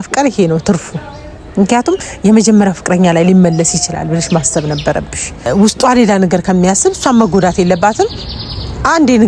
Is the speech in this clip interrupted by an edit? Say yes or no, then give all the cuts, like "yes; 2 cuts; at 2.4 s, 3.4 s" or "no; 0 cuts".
yes; 1 cut; at 5.5 s